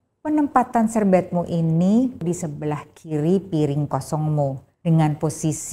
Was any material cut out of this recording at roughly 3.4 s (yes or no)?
no